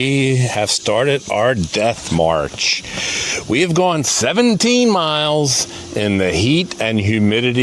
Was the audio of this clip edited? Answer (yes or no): no